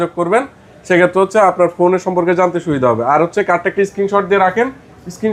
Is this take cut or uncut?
uncut